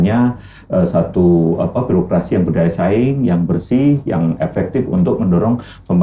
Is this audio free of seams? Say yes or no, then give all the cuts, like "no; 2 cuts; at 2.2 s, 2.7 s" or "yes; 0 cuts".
yes; 0 cuts